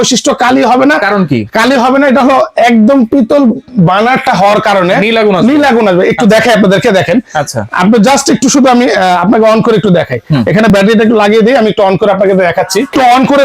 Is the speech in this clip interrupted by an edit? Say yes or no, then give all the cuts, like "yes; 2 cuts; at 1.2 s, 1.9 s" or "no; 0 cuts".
no; 0 cuts